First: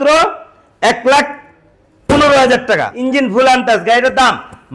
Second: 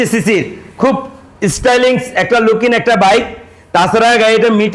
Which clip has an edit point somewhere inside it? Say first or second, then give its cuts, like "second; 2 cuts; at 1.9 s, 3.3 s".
first; 1 cut; at 2.9 s